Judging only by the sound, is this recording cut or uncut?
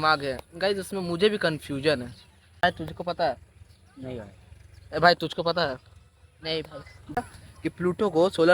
cut